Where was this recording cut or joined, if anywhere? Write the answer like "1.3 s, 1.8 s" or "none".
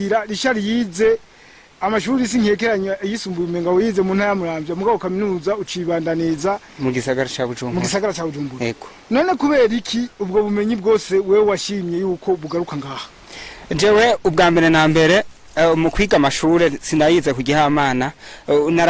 none